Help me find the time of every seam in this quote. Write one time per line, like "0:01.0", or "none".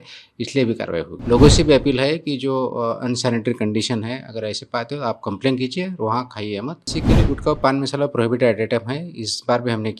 0:01.1
0:06.9